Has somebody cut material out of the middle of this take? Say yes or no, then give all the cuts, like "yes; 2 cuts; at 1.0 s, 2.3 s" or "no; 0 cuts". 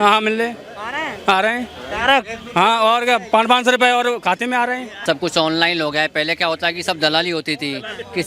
yes; 1 cut; at 4.9 s